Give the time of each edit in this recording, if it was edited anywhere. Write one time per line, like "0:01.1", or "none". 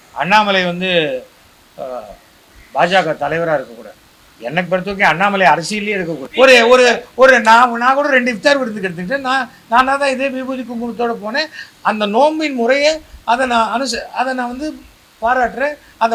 0:06.2